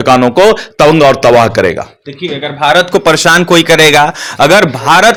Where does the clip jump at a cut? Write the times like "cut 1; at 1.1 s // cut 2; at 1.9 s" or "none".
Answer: none